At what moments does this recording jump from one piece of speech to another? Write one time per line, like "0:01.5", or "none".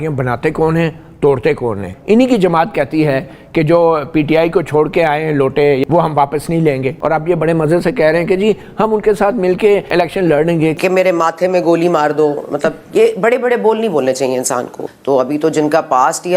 0:01.9
0:05.8
0:06.9
0:09.9
0:10.8
0:14.8